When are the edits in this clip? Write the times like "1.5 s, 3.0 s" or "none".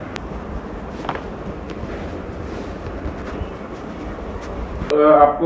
none